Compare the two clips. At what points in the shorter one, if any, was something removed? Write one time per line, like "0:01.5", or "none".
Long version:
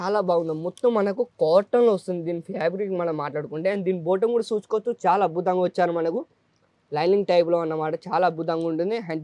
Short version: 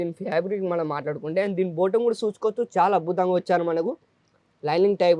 none